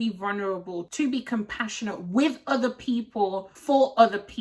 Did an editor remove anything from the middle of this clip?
yes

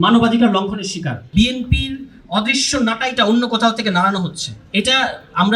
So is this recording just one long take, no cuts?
no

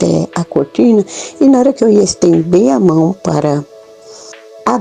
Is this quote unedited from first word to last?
yes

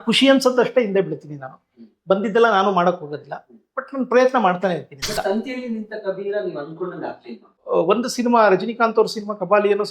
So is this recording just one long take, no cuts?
no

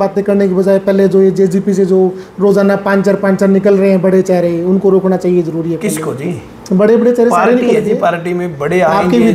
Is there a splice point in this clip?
no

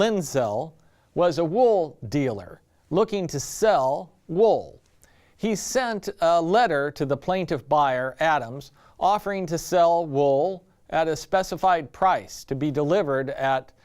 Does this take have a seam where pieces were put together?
yes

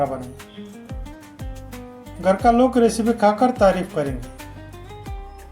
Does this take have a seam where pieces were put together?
yes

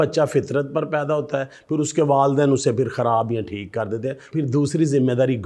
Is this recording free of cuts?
no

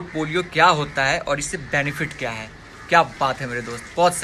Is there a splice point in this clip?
no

